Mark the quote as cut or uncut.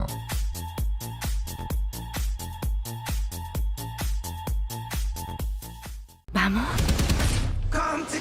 cut